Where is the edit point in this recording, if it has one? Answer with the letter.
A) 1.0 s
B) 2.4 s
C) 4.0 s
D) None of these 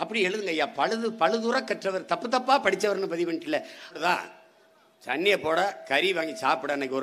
C